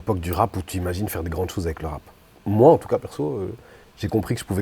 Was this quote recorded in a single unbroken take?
yes; 0 cuts

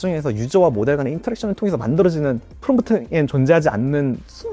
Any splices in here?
no; 0 cuts

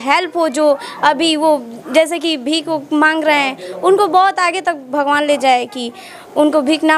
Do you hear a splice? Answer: no; 0 cuts

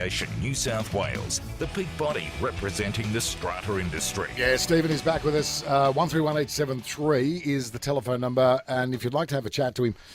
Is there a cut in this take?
no; 0 cuts

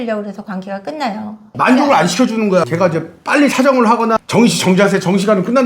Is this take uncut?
no; 2 cuts; at 1.5 s, 2.7 s

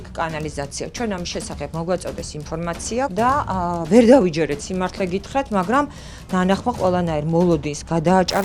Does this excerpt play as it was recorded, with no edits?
no; 1 cut; at 3.1 s

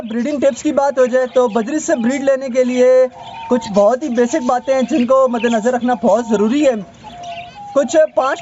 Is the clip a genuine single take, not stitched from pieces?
yes; 0 cuts

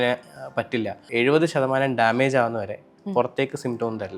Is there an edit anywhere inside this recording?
yes; 1 cut; at 1.0 s

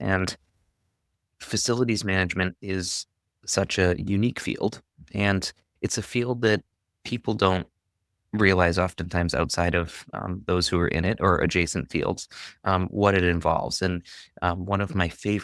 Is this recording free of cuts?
yes; 0 cuts

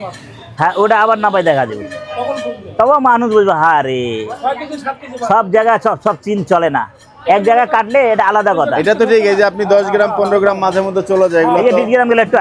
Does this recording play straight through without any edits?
yes; 0 cuts

